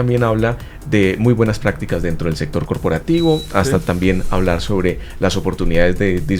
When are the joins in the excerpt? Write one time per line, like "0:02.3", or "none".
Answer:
none